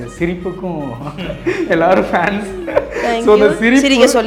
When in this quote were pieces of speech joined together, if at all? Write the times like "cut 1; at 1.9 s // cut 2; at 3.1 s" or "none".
none

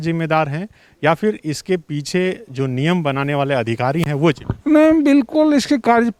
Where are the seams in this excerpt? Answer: none

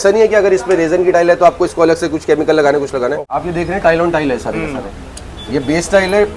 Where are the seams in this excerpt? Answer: cut 1; at 3.4 s

